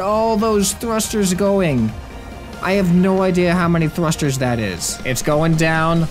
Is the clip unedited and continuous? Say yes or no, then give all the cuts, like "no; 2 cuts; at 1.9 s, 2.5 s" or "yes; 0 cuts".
no; 1 cut; at 4.9 s